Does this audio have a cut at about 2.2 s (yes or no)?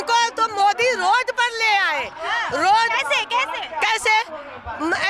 no